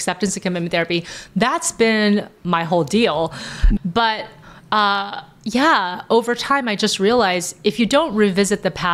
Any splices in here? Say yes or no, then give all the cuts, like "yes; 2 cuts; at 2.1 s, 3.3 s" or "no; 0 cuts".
yes; 1 cut; at 3.8 s